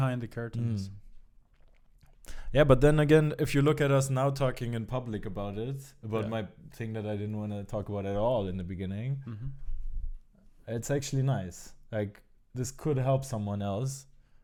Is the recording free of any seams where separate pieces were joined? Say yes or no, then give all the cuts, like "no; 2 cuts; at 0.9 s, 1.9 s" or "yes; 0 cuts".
yes; 0 cuts